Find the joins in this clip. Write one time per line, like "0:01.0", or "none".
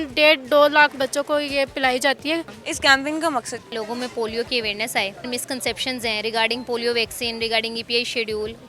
0:02.6
0:03.7
0:05.3